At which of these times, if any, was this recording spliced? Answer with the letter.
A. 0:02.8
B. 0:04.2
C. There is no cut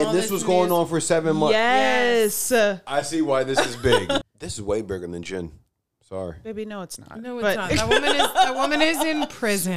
B